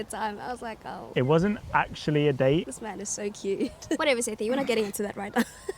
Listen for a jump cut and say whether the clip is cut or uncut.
cut